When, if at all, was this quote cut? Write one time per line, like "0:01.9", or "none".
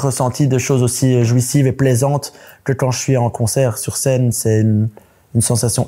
none